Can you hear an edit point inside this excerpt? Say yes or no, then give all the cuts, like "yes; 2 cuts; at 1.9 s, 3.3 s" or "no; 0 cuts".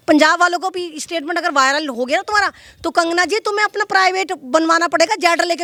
no; 0 cuts